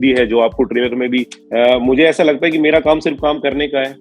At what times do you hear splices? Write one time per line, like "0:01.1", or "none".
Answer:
0:01.4

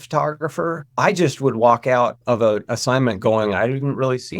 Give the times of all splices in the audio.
0:02.2

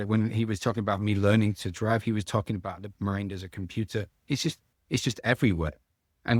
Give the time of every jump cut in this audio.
none

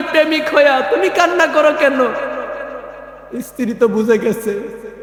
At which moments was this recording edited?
none

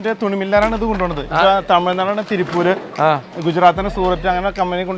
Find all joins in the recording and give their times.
none

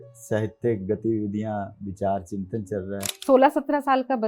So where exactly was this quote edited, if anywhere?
0:03.1

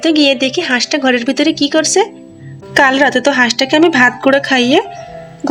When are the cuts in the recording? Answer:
none

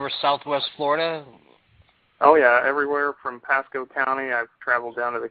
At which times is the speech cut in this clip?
0:03.8

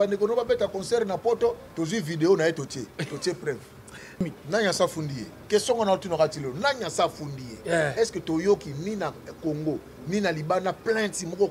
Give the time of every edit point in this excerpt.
0:04.2

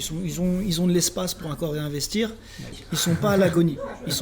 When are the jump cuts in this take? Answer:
0:02.8

